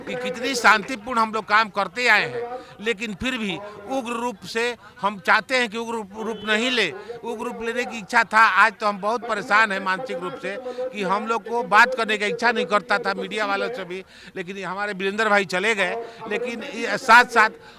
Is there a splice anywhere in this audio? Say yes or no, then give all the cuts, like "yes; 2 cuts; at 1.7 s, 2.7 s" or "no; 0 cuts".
no; 0 cuts